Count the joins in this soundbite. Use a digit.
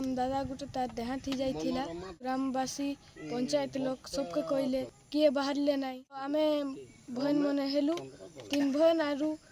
3